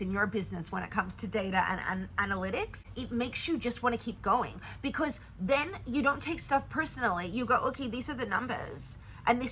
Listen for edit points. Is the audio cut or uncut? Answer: cut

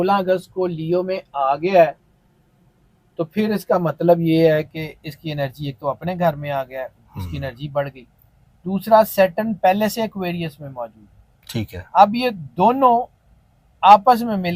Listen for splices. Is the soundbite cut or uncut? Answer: uncut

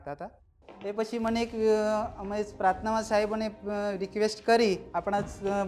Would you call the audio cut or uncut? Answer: uncut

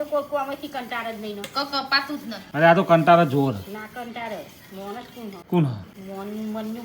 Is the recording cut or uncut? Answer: cut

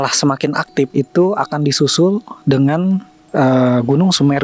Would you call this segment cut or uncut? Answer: cut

